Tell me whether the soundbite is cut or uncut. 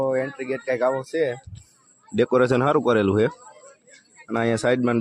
uncut